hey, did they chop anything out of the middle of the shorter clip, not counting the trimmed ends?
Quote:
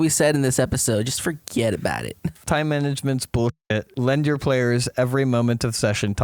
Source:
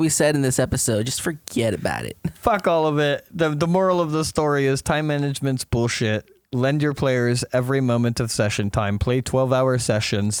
yes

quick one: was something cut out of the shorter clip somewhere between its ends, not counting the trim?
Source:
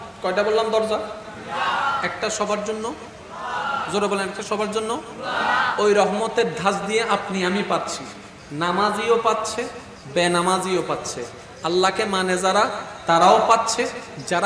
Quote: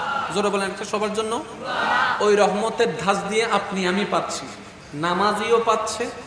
no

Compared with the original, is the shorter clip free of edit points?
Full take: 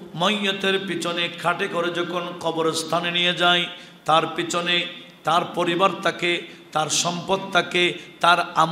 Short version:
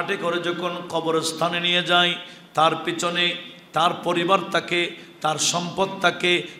yes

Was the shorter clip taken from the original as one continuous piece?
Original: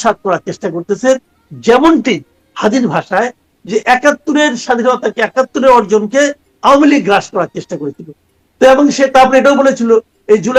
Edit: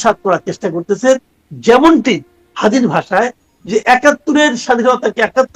yes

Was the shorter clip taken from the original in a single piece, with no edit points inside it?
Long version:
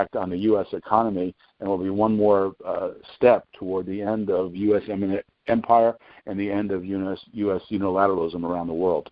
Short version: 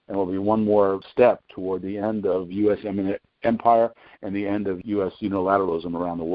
no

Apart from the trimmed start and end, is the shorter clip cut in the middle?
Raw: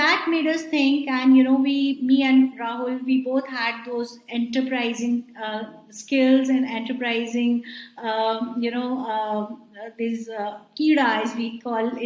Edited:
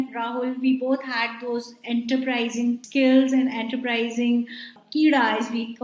yes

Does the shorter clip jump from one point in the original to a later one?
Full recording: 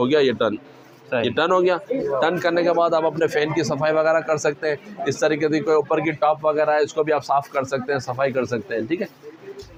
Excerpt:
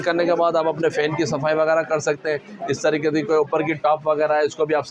no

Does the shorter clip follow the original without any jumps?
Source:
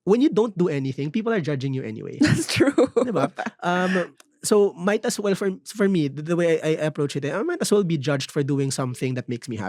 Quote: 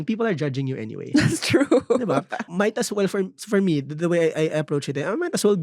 no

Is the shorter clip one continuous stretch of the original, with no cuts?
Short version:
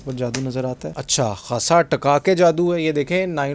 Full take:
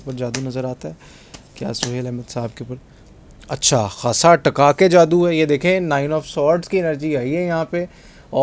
no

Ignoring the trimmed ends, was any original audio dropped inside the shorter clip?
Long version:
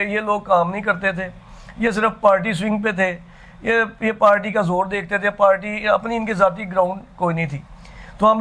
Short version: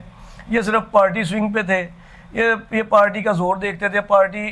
no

